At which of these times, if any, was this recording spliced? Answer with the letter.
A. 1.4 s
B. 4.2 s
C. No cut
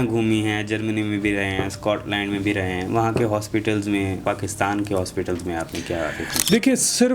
B